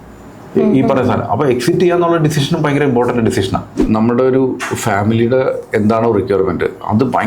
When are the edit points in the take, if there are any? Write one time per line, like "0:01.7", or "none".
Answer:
0:03.8